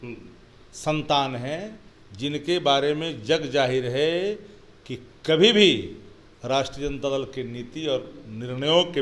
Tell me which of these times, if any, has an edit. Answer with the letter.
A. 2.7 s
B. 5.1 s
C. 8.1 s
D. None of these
D